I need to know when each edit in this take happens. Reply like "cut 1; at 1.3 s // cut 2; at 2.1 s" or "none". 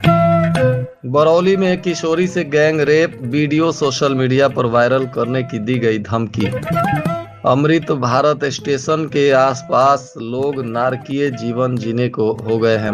cut 1; at 0.9 s